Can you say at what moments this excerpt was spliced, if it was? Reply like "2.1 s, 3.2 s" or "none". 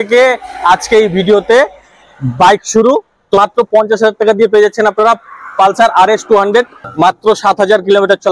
3.4 s, 6.8 s